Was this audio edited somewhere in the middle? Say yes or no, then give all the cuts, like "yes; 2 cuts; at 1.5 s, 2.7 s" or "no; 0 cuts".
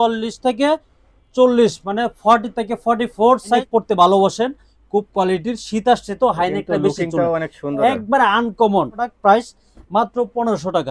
yes; 2 cuts; at 3.6 s, 9.0 s